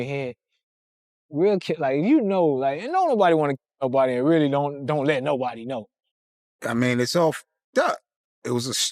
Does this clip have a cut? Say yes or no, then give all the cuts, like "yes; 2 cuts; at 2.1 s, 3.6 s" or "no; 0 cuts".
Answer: yes; 1 cut; at 6.0 s